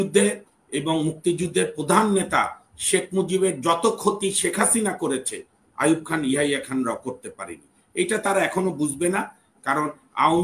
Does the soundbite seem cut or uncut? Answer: uncut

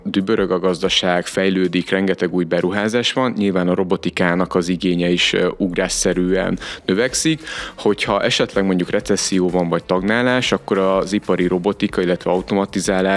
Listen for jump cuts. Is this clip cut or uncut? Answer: uncut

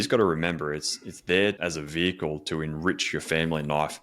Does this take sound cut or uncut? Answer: cut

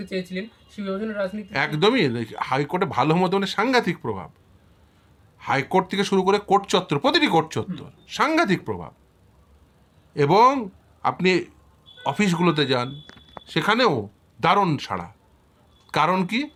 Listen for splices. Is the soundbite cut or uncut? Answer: uncut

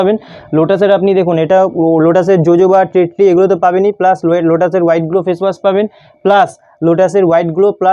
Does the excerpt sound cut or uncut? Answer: uncut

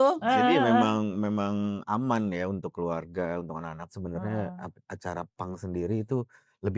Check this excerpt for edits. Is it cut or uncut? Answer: uncut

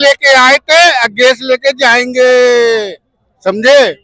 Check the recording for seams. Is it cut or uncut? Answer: uncut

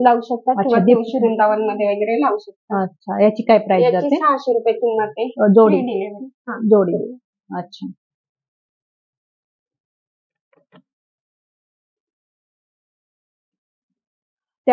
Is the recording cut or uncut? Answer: uncut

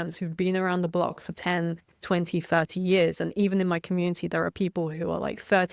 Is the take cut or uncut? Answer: uncut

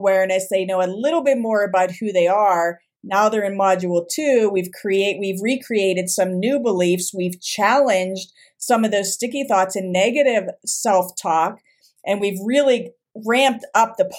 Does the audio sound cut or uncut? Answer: uncut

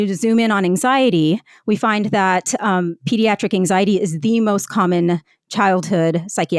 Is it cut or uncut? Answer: uncut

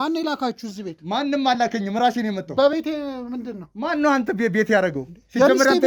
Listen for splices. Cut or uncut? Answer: uncut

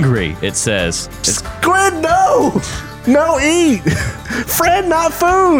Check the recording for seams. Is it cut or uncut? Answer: cut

